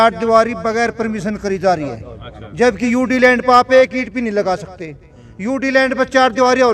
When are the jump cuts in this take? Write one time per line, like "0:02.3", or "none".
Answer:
none